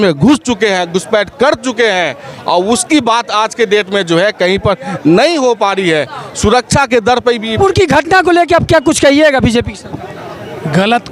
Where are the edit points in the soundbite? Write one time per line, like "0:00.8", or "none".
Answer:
0:07.6

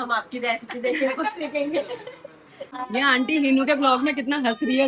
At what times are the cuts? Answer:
0:02.7

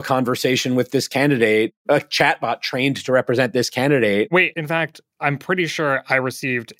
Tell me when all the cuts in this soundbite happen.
0:01.8
0:04.4

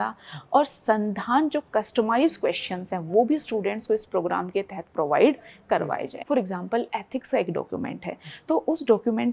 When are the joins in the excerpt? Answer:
0:06.1

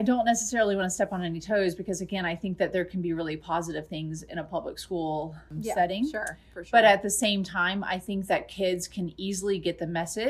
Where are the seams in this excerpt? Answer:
none

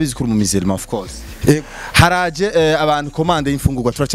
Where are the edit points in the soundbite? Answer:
none

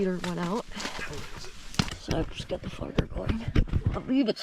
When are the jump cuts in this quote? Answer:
0:01.4
0:03.7

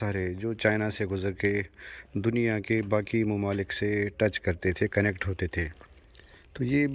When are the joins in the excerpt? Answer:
none

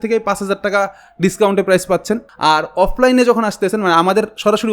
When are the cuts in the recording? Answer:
0:02.2

